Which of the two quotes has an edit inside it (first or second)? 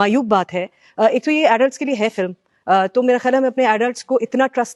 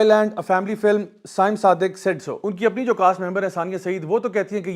second